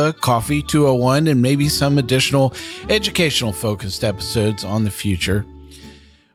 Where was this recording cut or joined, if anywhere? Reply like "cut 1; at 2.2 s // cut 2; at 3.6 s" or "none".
none